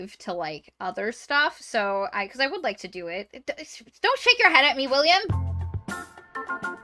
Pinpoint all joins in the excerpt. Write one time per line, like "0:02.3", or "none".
0:03.3
0:05.3